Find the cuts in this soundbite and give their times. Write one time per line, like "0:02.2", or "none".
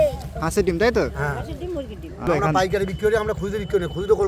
0:02.3